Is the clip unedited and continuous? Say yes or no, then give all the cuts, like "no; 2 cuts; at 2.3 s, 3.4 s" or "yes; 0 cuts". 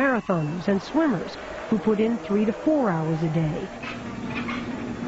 no; 1 cut; at 3.8 s